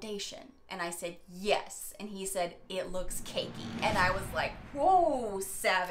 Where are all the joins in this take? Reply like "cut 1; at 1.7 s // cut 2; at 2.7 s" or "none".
none